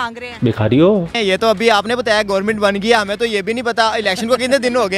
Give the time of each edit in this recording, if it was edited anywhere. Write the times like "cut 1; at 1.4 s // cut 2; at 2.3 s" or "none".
cut 1; at 1.1 s

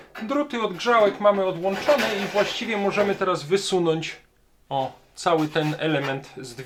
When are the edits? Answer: none

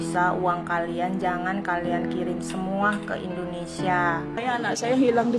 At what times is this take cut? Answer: cut 1; at 4.4 s

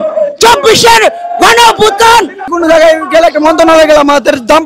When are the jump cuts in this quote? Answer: cut 1; at 2.4 s

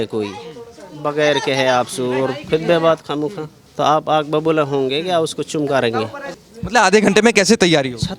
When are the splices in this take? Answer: cut 1; at 6.2 s

